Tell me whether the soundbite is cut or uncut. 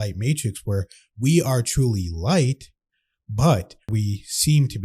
cut